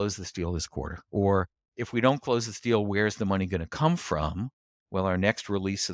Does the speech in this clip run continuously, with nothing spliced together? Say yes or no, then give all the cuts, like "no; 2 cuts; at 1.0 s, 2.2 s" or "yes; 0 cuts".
no; 1 cut; at 1.0 s